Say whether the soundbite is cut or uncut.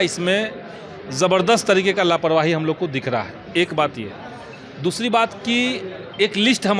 uncut